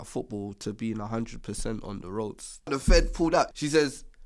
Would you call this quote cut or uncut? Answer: cut